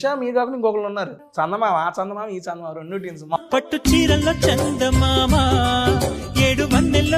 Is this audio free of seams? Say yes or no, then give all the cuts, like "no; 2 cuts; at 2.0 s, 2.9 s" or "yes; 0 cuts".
no; 2 cuts; at 1.2 s, 3.4 s